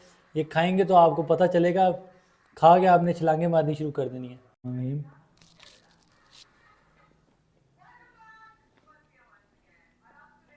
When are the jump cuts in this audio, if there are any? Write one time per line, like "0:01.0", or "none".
0:04.6